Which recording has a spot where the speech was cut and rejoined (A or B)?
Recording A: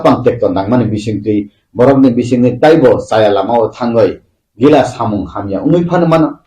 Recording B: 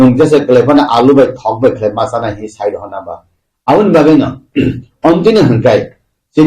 B